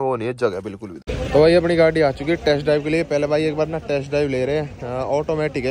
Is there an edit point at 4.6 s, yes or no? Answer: no